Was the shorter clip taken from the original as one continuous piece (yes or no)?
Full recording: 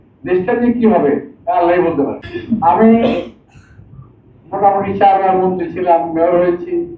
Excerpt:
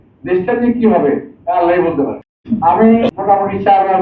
no